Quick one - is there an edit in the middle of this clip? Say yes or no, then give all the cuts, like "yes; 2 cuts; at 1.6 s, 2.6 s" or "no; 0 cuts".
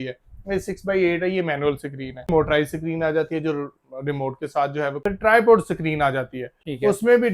yes; 2 cuts; at 2.3 s, 5.0 s